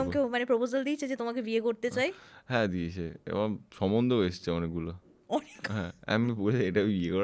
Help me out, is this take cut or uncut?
uncut